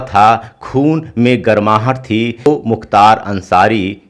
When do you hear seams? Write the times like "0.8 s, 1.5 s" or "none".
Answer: 2.5 s